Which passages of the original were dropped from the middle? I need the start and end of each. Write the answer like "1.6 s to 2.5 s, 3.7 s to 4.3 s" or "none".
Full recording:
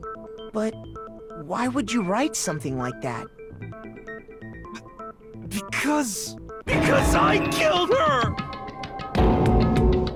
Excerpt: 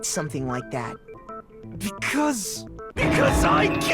3.5 s to 4.9 s

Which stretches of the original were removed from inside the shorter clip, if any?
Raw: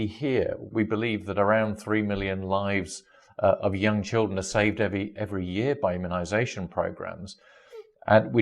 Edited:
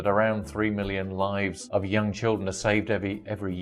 3.0 s to 3.6 s

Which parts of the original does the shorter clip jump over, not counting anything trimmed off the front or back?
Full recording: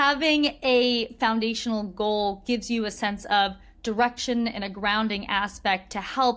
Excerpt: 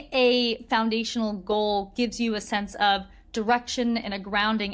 none

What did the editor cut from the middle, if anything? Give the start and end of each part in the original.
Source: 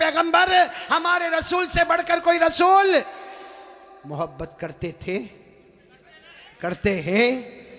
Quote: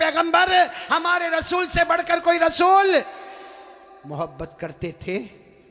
none

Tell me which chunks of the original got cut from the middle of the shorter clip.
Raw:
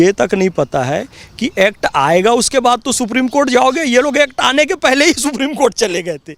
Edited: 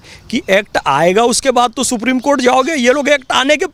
none

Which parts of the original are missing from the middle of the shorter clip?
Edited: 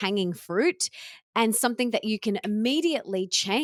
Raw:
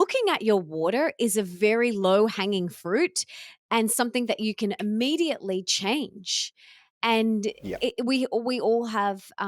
none

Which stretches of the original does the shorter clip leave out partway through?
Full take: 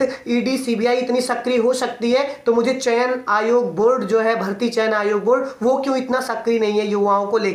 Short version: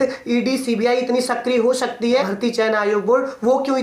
2.3 s to 4.5 s

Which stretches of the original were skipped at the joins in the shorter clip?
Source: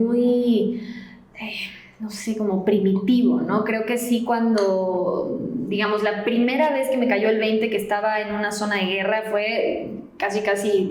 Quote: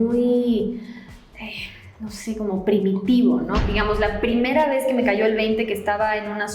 3.6 s to 5.7 s

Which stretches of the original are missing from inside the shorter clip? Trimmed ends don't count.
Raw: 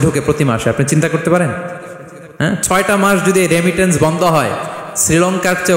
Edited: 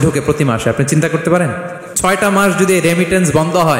2.0 s to 2.6 s

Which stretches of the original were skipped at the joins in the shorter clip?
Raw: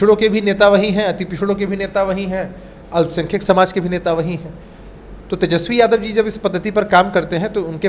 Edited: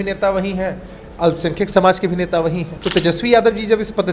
4.5 s to 5.2 s

